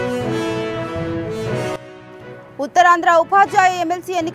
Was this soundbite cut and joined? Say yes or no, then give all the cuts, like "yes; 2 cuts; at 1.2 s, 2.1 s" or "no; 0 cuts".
yes; 1 cut; at 1.8 s